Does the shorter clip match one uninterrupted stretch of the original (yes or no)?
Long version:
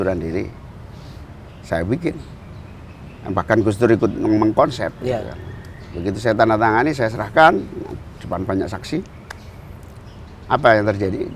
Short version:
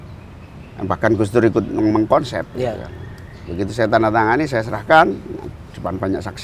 yes